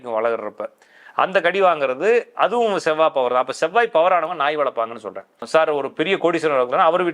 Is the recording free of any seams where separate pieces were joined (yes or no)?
no